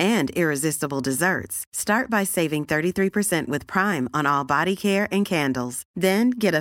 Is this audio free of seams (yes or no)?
yes